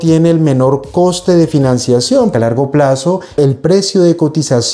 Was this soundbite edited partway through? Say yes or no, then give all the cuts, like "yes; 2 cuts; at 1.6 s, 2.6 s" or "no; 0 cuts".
yes; 1 cut; at 2.3 s